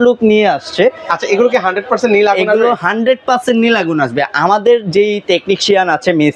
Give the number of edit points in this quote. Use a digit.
0